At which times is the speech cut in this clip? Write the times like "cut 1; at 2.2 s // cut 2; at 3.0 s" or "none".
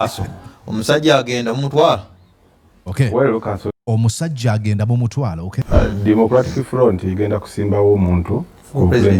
cut 1; at 5.6 s